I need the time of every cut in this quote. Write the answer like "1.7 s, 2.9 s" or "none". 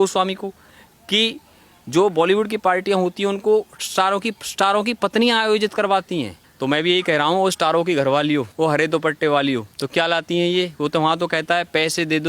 6.4 s